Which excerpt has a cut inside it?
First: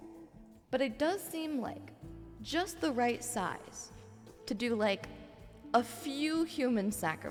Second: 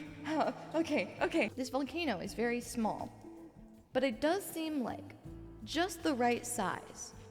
second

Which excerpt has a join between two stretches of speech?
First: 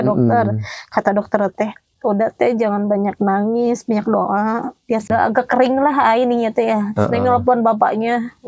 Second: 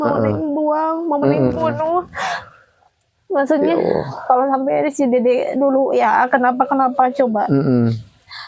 first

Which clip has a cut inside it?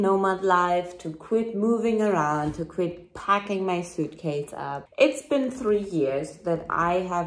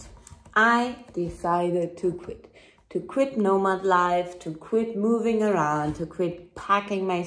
first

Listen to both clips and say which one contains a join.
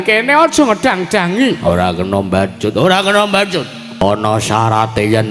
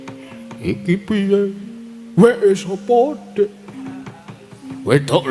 first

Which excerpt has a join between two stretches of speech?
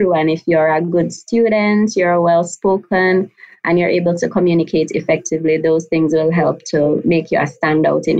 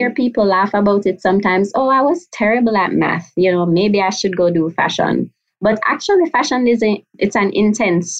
second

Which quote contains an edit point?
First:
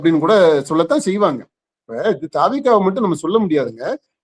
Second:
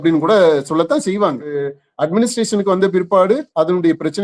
second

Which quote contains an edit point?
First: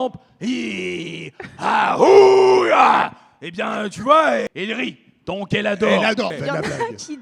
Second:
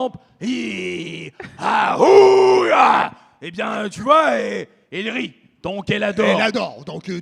first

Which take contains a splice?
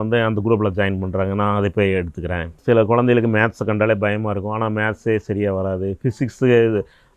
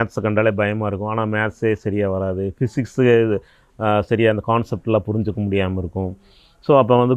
first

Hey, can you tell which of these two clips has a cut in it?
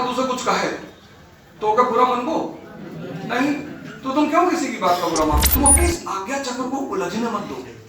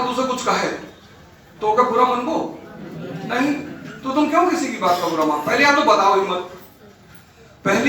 first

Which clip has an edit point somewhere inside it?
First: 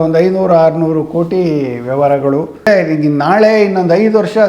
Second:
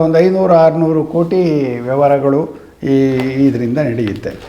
first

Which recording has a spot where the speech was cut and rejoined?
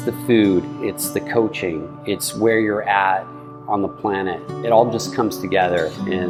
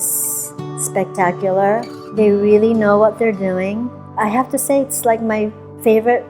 second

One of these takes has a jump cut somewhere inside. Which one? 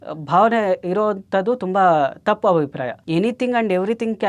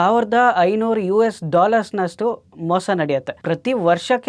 second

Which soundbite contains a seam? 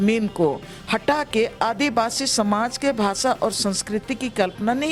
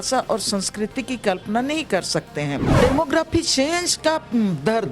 second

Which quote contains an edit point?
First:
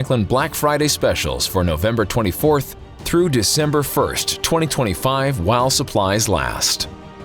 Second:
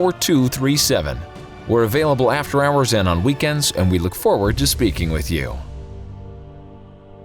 second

